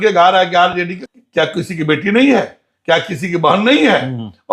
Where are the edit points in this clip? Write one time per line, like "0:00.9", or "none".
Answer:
0:01.0